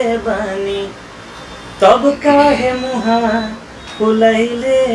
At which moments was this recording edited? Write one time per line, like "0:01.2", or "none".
none